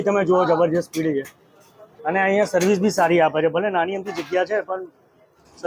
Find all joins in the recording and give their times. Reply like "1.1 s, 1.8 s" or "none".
none